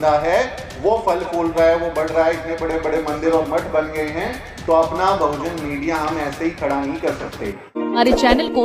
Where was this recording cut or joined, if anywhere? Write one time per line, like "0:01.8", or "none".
0:07.6